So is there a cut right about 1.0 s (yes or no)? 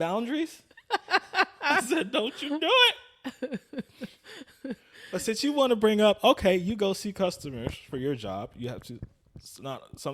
no